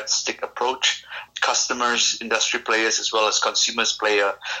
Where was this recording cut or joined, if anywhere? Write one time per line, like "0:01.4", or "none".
0:01.2